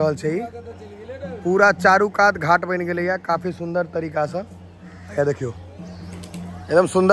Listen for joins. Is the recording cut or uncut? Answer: uncut